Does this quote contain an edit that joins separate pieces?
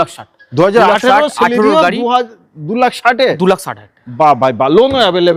no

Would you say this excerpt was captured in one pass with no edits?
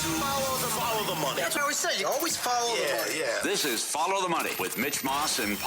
no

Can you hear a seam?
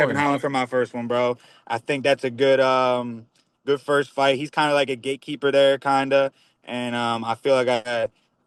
no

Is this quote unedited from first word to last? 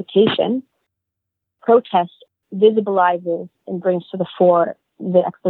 no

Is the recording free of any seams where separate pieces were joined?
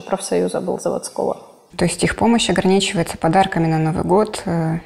no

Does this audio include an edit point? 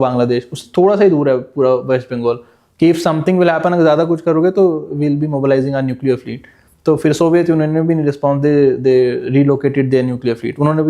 no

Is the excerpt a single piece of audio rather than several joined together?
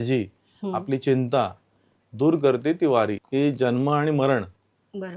no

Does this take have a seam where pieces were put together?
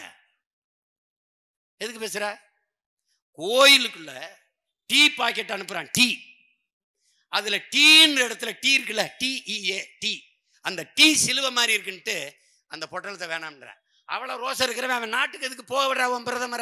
no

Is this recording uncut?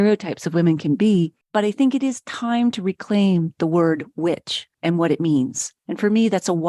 yes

